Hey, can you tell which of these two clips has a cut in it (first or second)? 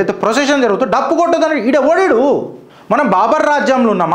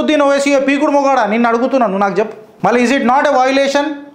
second